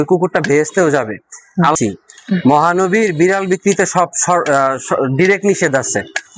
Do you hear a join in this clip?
yes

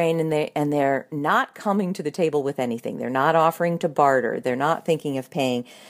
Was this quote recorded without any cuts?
no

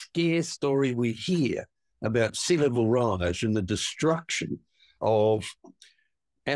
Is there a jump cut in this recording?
no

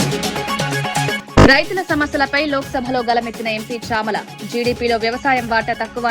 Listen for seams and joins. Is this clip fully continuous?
no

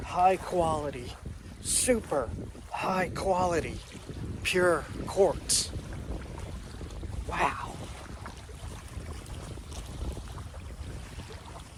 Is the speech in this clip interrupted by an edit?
no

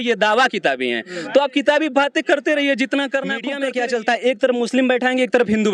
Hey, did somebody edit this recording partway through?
yes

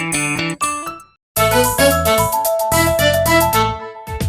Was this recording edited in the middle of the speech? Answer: yes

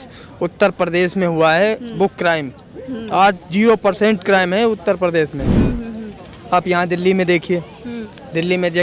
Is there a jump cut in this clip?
no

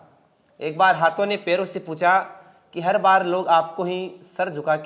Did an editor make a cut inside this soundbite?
no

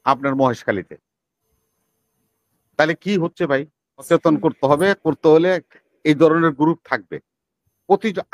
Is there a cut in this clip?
yes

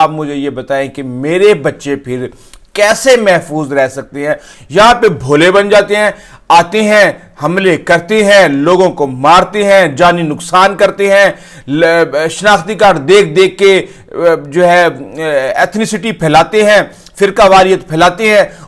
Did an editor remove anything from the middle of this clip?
yes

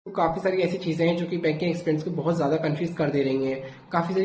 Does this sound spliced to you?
no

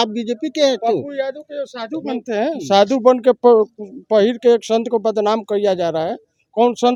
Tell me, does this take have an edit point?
no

